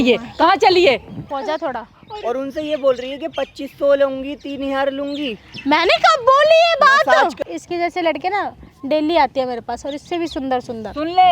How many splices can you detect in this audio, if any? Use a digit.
2